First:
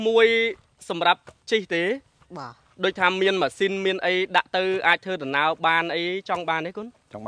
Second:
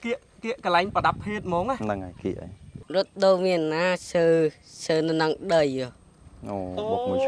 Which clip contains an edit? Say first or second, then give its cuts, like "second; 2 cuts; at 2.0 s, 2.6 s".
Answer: second; 1 cut; at 2.8 s